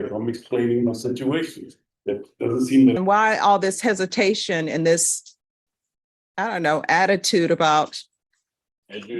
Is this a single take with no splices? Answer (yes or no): no